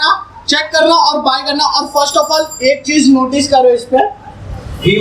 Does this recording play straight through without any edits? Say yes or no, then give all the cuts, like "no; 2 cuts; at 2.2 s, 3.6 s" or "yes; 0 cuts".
yes; 0 cuts